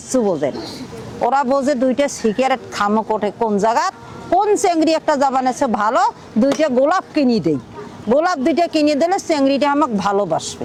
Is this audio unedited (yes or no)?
yes